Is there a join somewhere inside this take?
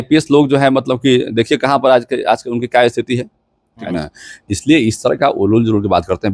yes; 1 cut; at 3.8 s

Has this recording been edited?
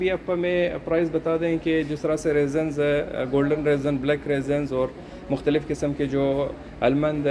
no; 0 cuts

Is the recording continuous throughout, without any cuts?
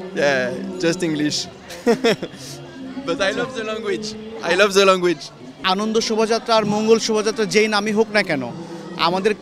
no; 1 cut; at 5.5 s

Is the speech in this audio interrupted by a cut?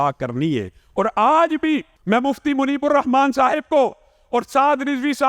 yes; 1 cut; at 1.9 s

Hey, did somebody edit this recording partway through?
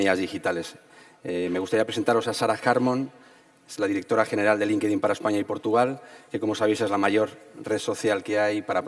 yes; 1 cut; at 4.8 s

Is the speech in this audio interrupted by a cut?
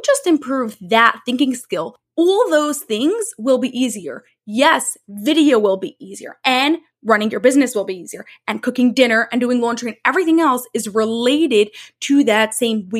yes; 1 cut; at 2.0 s

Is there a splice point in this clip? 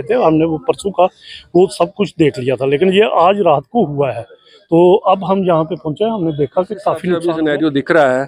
yes; 1 cut; at 7.2 s

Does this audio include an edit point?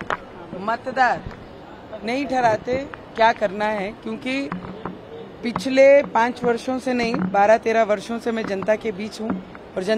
no; 0 cuts

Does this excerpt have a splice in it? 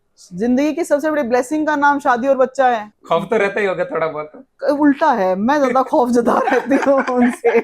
yes; 1 cut; at 2.9 s

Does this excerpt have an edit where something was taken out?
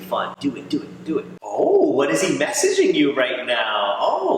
no; 0 cuts

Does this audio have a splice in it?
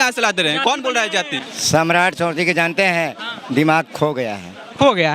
yes; 1 cut; at 1.4 s

